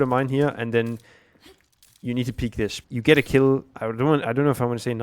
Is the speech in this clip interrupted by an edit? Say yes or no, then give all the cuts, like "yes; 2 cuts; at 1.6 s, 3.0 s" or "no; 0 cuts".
yes; 2 cuts; at 2.8 s, 3.8 s